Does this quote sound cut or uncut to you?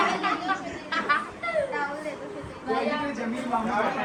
uncut